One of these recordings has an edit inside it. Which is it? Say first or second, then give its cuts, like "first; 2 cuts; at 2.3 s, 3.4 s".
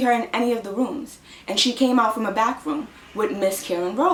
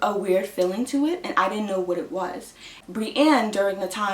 second; 1 cut; at 2.8 s